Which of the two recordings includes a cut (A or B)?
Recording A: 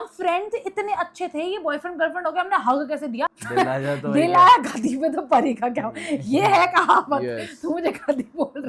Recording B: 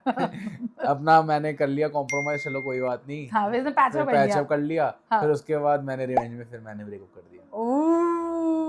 A